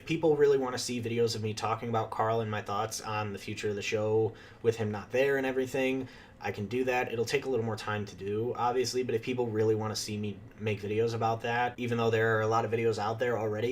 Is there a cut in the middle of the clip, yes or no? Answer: yes